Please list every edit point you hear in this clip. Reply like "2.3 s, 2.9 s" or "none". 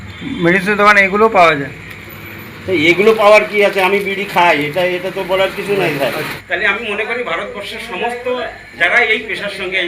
6.4 s